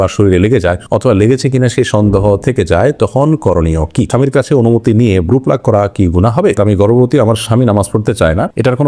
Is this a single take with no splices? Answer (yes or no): no